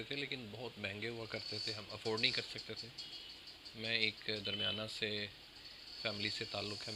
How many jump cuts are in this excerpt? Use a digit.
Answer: 0